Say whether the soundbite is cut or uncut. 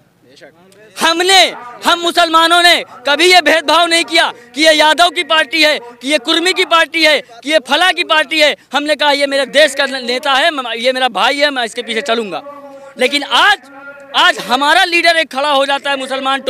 uncut